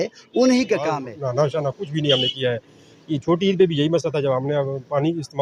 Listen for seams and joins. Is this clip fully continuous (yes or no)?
no